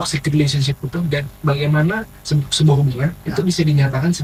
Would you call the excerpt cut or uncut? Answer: uncut